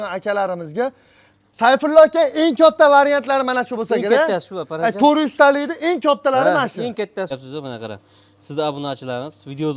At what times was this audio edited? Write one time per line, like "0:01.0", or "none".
0:07.4